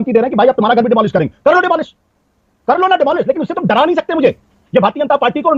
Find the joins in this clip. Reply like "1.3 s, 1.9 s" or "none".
4.4 s

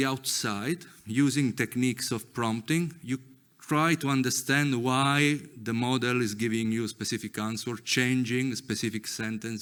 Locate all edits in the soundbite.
none

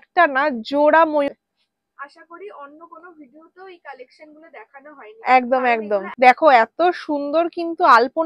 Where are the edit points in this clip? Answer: 1.3 s, 6.1 s

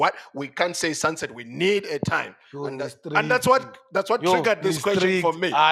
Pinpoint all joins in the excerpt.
none

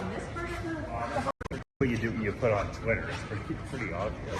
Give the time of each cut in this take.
1.3 s

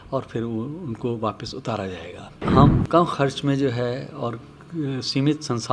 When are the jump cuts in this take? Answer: 2.4 s

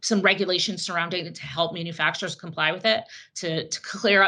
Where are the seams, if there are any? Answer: none

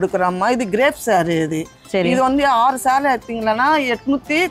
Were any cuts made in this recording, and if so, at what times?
none

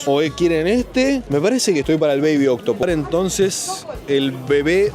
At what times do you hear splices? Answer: 2.8 s

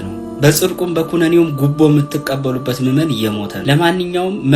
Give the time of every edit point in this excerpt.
3.5 s

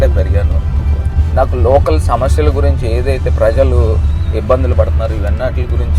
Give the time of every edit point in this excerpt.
none

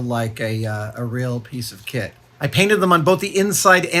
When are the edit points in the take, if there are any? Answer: 2.2 s

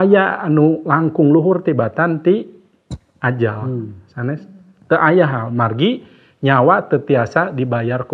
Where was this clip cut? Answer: none

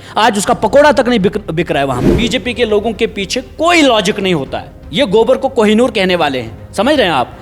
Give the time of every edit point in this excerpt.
2.1 s

